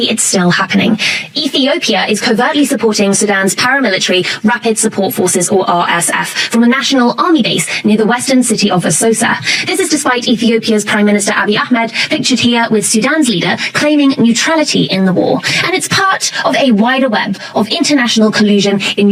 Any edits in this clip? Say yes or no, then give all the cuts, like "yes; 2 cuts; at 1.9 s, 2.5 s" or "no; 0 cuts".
no; 0 cuts